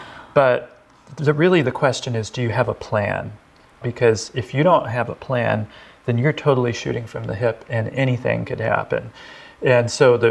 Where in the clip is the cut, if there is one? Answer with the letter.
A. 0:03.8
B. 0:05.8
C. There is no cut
A